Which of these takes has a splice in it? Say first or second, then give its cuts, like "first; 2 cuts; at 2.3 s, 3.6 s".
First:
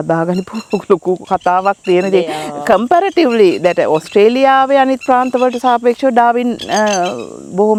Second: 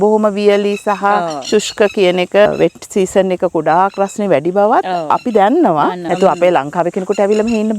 second; 2 cuts; at 2.5 s, 6.0 s